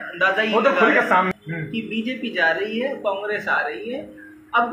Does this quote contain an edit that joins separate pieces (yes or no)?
yes